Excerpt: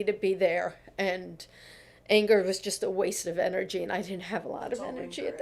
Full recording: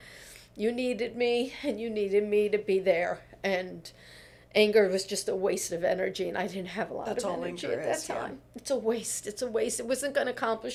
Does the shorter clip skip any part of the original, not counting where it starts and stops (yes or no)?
no